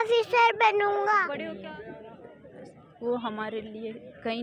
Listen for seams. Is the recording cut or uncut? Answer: cut